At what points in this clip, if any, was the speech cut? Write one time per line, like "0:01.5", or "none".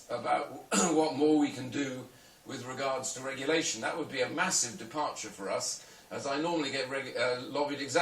0:04.1